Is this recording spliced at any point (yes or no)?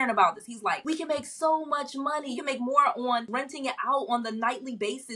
yes